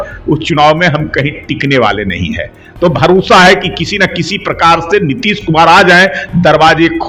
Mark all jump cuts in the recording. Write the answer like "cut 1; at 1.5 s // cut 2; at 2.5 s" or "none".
none